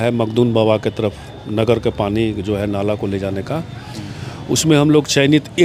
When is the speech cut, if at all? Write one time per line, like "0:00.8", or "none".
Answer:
none

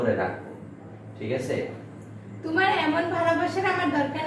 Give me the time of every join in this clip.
none

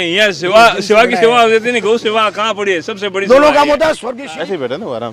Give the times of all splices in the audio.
0:04.1

